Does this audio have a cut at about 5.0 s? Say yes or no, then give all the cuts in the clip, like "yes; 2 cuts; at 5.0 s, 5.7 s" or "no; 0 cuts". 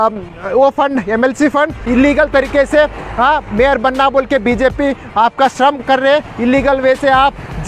no; 1 cut; at 1.8 s